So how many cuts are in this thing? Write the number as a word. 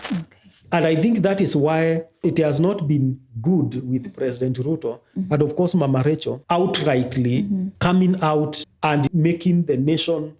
zero